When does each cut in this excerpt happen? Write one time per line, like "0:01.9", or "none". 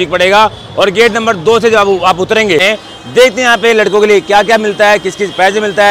0:02.6

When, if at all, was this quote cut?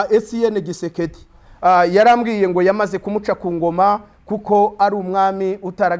0:01.4

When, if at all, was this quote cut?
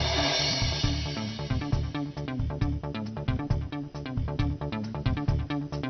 0:01.7

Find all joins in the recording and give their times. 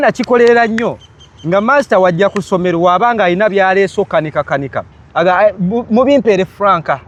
none

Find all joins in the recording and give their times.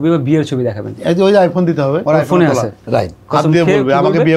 0:02.0
0:03.2

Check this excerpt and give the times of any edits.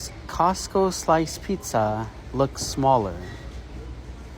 none

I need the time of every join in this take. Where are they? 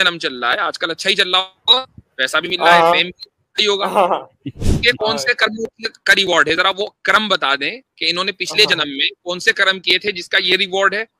none

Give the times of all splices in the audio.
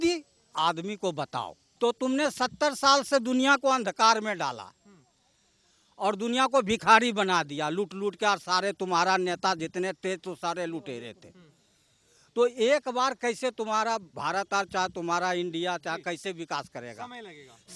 0:01.6

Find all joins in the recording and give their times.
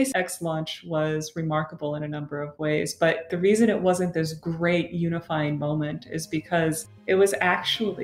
0:03.3

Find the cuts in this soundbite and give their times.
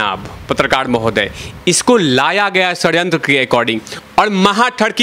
0:03.9

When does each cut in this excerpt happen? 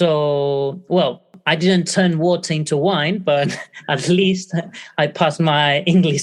0:01.3

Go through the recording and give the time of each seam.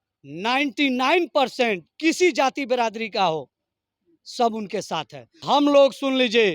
0:05.4

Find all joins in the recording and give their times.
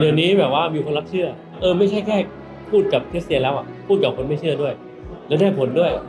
0:01.6
0:02.6

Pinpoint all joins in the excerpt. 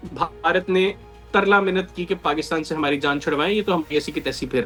none

